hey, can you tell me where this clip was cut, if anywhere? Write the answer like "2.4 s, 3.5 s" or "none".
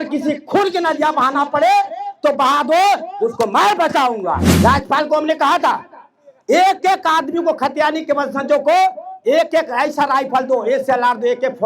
4.5 s